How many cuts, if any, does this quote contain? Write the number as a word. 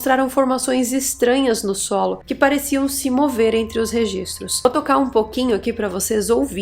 one